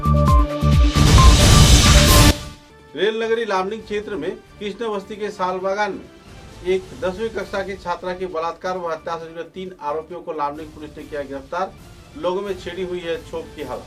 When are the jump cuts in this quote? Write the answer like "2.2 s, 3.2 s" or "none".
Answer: none